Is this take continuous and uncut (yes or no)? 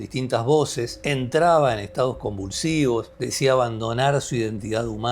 no